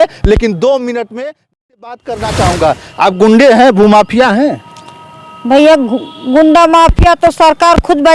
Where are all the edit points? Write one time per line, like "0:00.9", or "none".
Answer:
0:01.8